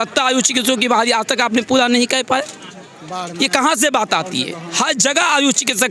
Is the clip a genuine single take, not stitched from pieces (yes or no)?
yes